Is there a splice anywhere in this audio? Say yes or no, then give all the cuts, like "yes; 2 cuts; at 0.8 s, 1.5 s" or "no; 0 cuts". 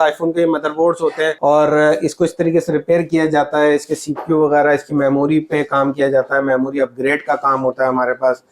yes; 1 cut; at 1.4 s